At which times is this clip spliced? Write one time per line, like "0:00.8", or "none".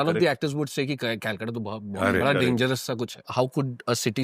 0:03.2